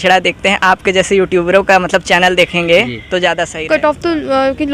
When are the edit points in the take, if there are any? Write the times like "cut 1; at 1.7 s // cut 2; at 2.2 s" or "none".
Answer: cut 1; at 3.4 s